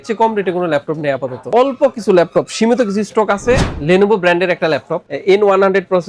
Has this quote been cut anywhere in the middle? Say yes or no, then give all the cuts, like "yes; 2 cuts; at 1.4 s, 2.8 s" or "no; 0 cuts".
yes; 2 cuts; at 1.5 s, 3.7 s